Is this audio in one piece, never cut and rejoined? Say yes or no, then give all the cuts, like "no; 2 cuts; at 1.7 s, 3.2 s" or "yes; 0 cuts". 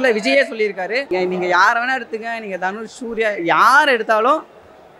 no; 1 cut; at 1.1 s